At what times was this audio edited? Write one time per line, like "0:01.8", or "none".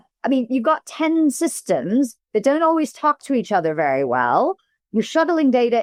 none